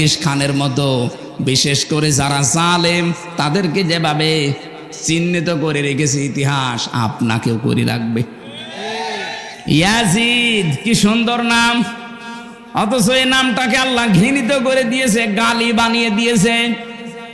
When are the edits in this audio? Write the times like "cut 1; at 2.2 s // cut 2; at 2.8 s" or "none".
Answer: none

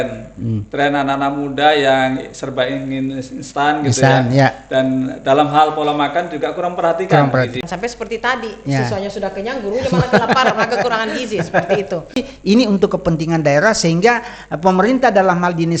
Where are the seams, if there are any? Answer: cut 1; at 7.6 s // cut 2; at 12.3 s

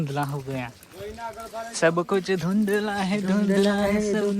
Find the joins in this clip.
none

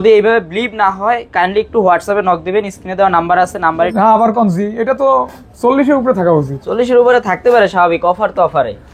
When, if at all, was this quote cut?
cut 1; at 3.8 s

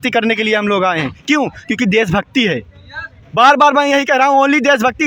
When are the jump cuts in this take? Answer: none

